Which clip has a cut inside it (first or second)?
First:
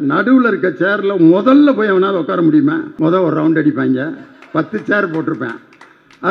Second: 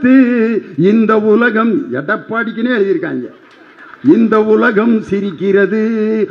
first